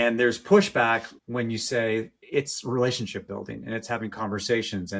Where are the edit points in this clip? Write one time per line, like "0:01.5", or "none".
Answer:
0:01.2
0:02.2